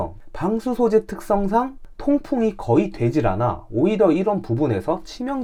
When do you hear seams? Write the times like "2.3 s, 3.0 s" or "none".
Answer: none